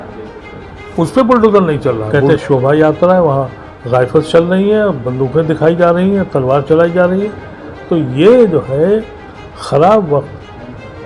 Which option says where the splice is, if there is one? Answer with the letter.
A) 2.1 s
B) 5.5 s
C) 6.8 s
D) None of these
A